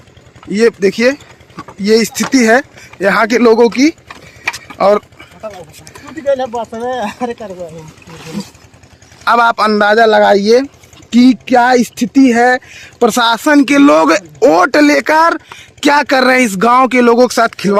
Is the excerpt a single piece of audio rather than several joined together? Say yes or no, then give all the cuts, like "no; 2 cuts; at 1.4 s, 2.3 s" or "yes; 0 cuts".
yes; 0 cuts